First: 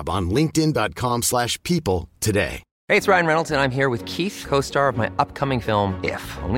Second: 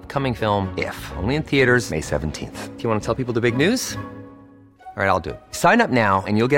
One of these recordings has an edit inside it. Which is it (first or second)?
first